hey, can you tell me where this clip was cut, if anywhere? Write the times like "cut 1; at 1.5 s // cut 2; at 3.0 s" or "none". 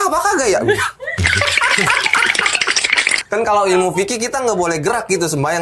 none